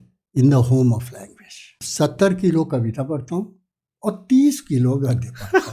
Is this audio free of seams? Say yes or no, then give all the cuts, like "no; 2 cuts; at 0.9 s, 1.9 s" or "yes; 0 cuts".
no; 1 cut; at 1.8 s